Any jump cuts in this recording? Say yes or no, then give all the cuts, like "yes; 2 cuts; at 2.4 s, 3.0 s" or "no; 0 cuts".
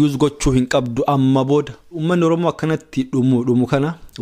yes; 1 cut; at 1.9 s